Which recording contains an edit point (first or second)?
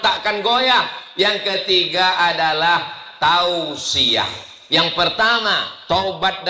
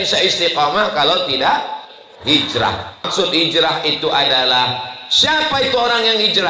second